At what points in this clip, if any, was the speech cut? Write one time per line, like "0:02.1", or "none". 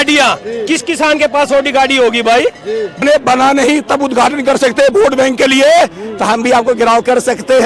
0:03.0